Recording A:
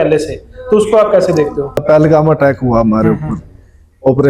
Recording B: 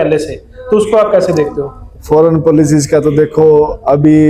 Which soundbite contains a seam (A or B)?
A